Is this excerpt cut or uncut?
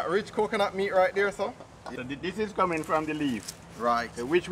cut